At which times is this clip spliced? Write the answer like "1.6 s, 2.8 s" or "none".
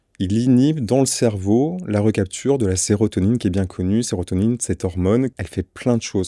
5.3 s